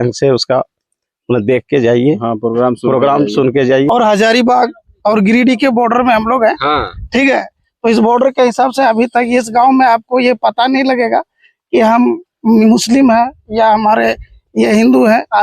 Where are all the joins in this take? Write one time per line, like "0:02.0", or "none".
0:03.9

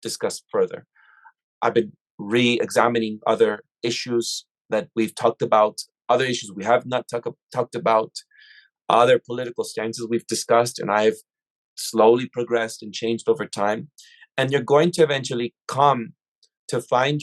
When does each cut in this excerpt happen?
0:01.5

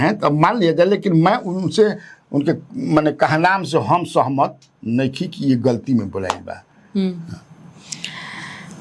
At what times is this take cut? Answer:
none

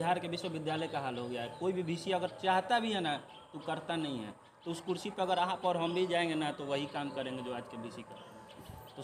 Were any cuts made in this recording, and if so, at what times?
none

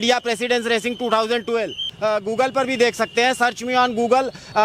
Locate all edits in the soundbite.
0:01.9

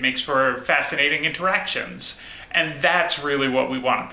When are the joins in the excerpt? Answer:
none

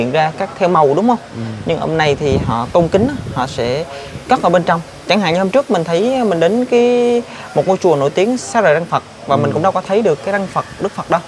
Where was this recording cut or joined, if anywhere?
none

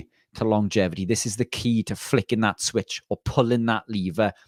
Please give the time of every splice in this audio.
none

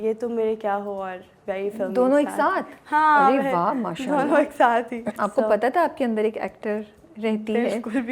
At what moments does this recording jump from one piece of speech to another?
none

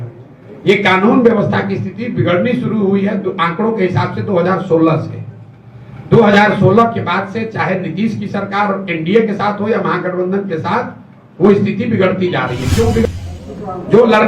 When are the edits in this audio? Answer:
0:13.1

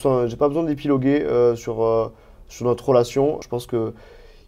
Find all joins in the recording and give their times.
0:03.4

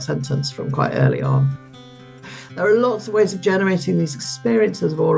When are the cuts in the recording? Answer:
0:01.9

